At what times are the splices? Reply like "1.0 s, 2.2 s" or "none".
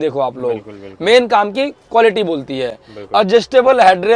none

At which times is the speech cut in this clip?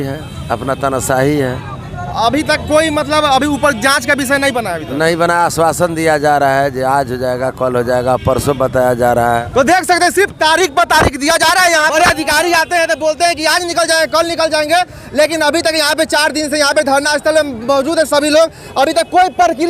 9.4 s, 11.9 s

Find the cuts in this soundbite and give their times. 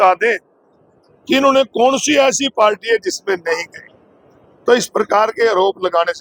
none

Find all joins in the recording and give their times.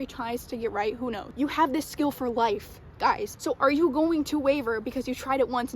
none

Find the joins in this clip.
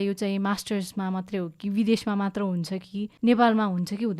3.0 s

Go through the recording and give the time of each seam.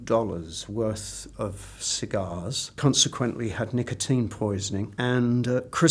2.7 s, 4.9 s

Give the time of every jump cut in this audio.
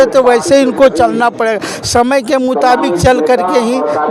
none

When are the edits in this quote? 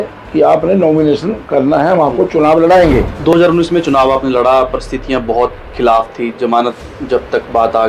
3.4 s

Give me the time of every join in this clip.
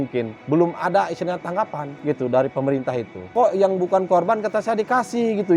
3.3 s

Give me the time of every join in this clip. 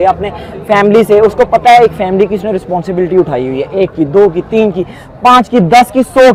none

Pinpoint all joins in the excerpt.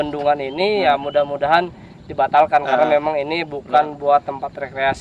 none

